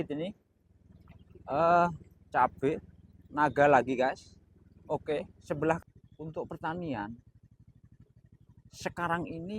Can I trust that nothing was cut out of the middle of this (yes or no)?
no